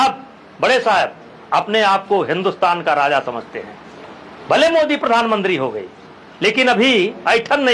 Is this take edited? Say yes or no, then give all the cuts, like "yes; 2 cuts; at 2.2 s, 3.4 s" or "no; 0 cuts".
no; 0 cuts